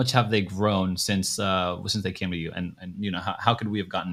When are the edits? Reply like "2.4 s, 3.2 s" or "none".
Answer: none